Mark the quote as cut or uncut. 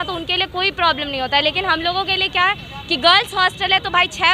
uncut